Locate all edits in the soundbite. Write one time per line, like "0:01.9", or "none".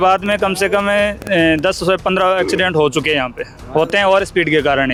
none